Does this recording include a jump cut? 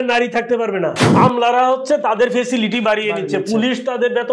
yes; 1 cut; at 1.0 s

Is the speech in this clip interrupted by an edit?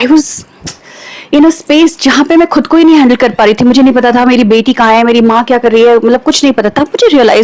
no; 0 cuts

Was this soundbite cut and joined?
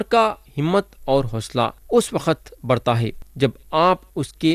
yes; 2 cuts; at 1.8 s, 3.2 s

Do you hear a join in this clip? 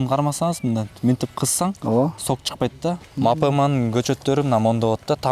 yes; 1 cut; at 3.0 s

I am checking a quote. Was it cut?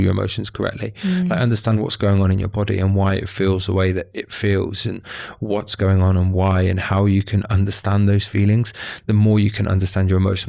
no; 0 cuts

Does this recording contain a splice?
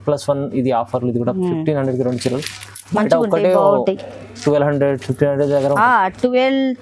no; 0 cuts

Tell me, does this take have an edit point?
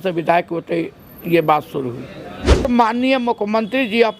yes; 1 cut; at 2.7 s

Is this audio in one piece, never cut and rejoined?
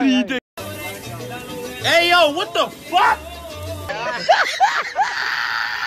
yes; 0 cuts

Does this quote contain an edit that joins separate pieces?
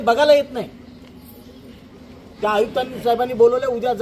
yes; 1 cut; at 2.3 s

